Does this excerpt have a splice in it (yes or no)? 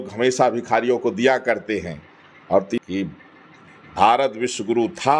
yes